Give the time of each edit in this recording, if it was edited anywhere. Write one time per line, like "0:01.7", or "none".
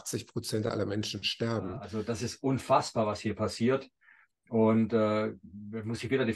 0:01.9

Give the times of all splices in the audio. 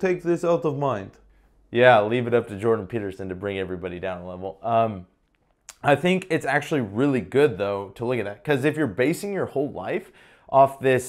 none

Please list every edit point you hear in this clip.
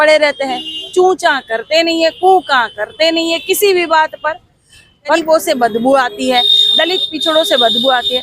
0:05.2

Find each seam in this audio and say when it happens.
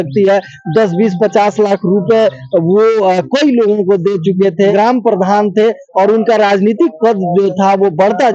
0:04.7

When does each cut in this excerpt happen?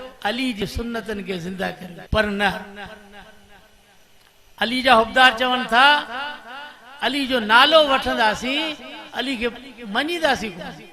0:01.9

